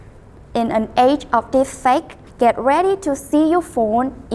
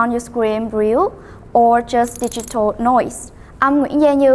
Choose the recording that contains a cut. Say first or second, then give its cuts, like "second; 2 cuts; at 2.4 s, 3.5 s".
first; 1 cut; at 2.2 s